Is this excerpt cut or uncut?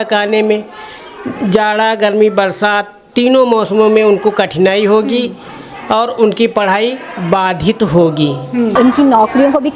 cut